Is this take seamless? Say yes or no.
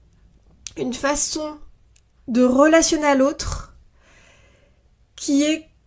yes